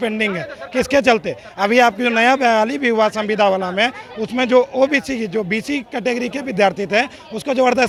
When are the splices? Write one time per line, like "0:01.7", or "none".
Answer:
none

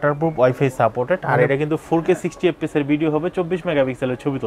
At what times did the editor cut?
none

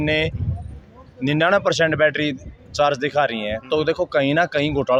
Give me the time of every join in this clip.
none

